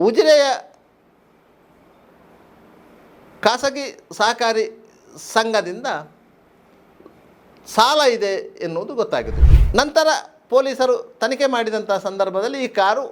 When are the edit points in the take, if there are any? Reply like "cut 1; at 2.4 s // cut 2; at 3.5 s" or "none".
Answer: cut 1; at 9.4 s